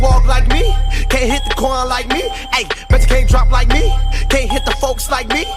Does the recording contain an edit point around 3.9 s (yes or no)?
no